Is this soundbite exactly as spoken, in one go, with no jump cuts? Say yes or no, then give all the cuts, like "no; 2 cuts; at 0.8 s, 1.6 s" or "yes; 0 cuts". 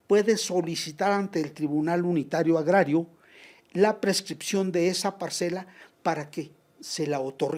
yes; 0 cuts